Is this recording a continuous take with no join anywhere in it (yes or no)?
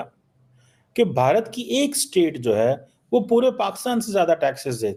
yes